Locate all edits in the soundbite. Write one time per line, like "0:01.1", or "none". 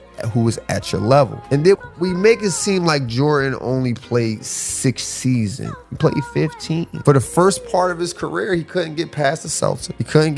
0:01.4